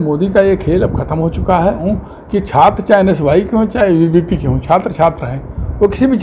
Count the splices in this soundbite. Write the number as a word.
one